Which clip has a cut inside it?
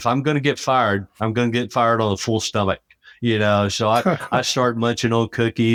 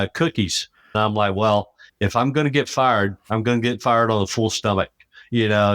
second; 1 cut; at 1.0 s

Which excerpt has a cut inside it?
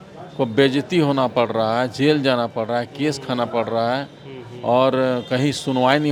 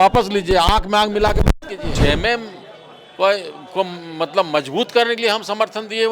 second; 1 cut; at 1.9 s

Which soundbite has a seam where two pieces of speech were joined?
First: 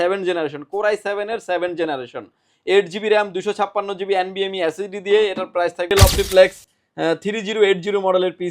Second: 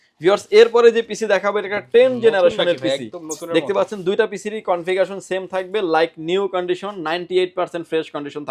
first; 1 cut; at 5.9 s

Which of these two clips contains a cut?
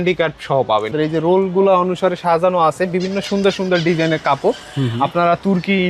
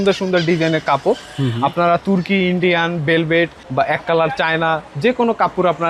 first; 1 cut; at 0.9 s

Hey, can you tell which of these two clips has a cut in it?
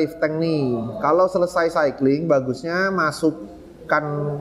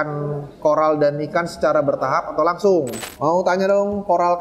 second; 1 cut; at 3.0 s

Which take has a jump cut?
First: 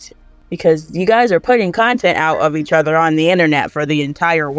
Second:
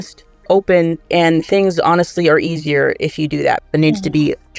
second; 2 cuts; at 1.0 s, 3.6 s

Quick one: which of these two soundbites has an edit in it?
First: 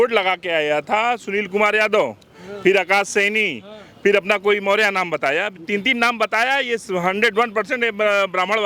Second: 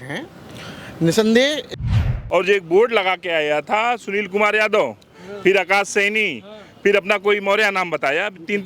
second; 1 cut; at 1.8 s

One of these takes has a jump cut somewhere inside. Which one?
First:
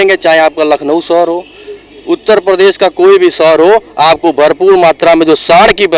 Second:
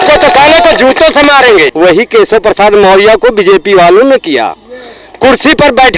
second; 1 cut; at 1.7 s

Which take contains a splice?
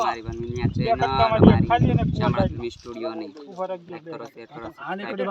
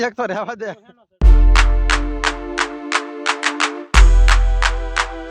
second; 1 cut; at 1.1 s

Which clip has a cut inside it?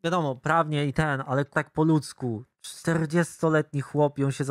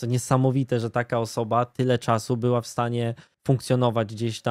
first; 1 cut; at 1.5 s

